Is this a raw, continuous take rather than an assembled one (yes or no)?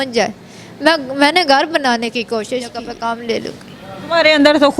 no